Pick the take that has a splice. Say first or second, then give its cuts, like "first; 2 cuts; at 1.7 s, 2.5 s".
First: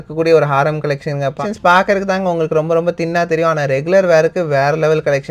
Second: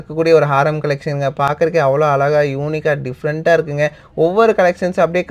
first; 1 cut; at 1.4 s